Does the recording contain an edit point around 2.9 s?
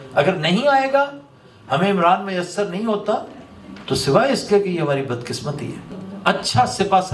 no; 1 cut; at 5.9 s

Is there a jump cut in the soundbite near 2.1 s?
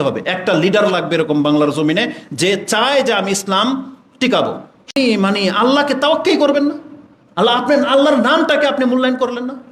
no; 1 cut; at 5.0 s

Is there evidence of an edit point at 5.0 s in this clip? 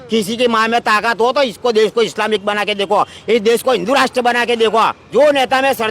yes; 1 cut; at 5.0 s

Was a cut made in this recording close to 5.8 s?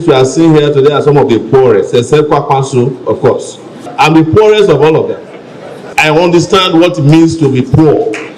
yes; 2 cuts; at 3.9 s, 5.8 s

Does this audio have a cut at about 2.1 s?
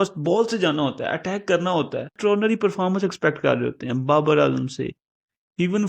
yes; 1 cut; at 2.1 s

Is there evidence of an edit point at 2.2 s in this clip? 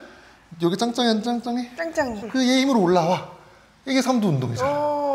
yes; 1 cut; at 2.2 s

